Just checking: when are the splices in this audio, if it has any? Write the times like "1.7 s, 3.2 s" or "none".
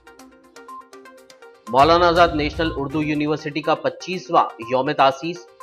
1.2 s